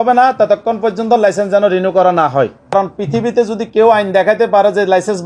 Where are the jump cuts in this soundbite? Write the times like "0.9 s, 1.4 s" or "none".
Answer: 2.7 s